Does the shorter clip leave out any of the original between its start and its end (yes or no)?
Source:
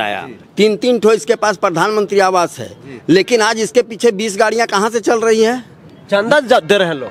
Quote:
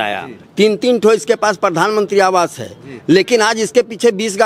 no